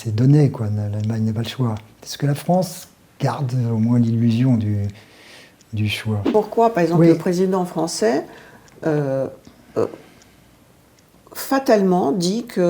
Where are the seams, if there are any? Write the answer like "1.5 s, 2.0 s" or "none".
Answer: 6.3 s